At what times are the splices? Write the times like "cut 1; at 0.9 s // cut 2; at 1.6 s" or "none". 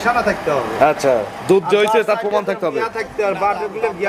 none